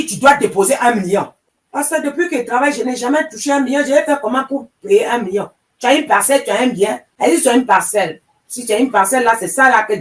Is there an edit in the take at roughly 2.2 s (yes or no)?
no